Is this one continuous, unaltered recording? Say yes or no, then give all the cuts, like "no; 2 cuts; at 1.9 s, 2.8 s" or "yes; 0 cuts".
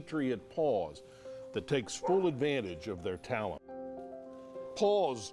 no; 1 cut; at 3.8 s